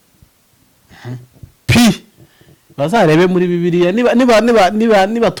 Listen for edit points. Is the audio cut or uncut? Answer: uncut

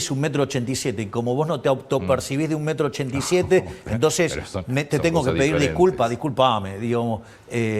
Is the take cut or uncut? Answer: uncut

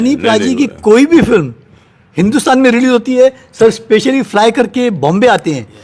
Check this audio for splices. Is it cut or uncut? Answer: uncut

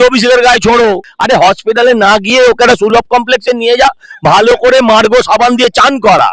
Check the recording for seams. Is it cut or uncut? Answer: cut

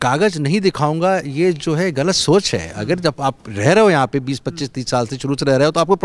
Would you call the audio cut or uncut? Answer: uncut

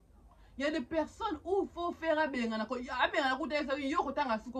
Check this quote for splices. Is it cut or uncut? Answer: uncut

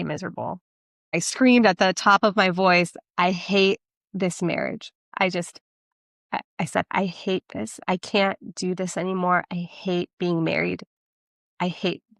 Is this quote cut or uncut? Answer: cut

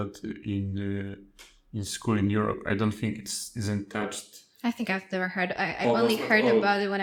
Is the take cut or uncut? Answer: uncut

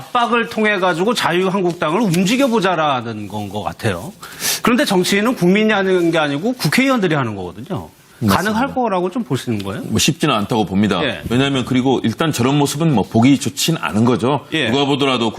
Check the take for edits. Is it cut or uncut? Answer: cut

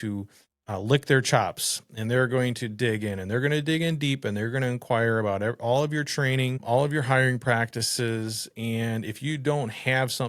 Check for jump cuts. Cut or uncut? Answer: cut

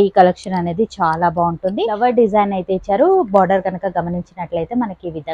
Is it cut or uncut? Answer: cut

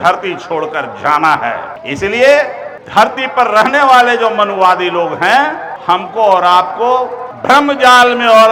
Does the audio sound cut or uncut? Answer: uncut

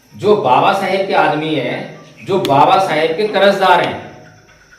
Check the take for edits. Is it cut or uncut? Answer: uncut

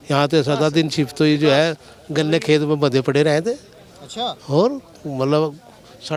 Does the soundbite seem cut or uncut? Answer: uncut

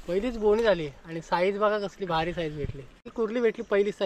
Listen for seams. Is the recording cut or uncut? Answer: cut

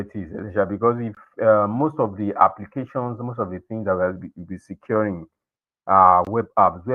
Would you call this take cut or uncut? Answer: uncut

